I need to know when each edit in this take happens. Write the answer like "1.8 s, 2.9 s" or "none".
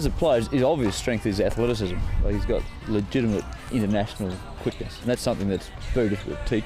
2.7 s, 3.6 s, 5.0 s, 5.8 s

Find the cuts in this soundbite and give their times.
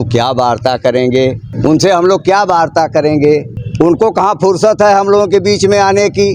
1.5 s, 3.6 s

